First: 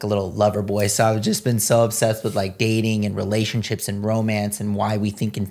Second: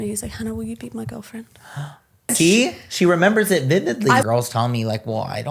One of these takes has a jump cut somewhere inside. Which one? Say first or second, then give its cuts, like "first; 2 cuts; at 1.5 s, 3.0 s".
second; 2 cuts; at 2.3 s, 4.2 s